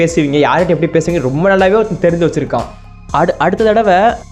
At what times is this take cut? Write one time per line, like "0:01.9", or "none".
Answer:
none